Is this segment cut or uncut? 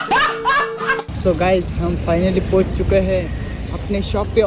cut